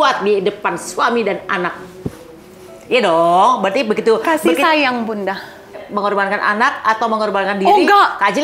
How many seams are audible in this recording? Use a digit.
1